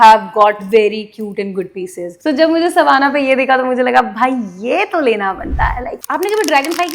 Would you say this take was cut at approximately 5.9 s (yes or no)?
yes